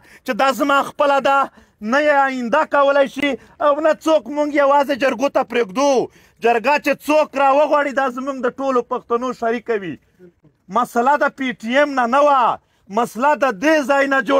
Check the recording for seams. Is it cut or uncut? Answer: uncut